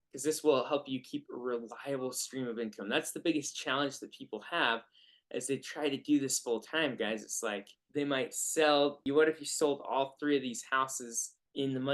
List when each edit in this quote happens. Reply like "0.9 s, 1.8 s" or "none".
7.7 s, 9.0 s